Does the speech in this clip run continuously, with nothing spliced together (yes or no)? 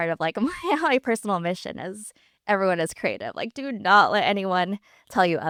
yes